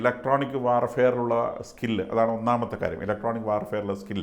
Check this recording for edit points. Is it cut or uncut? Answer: uncut